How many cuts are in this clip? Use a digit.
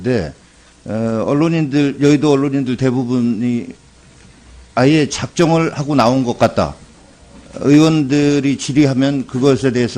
0